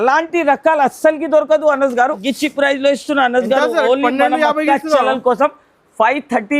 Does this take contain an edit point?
yes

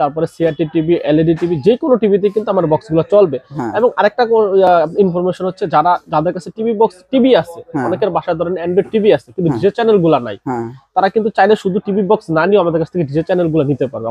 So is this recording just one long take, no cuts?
yes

